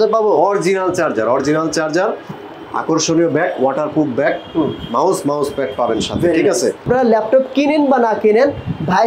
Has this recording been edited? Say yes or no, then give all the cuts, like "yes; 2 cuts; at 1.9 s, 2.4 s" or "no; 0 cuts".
yes; 1 cut; at 6.8 s